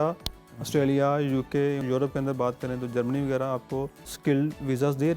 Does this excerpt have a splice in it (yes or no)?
yes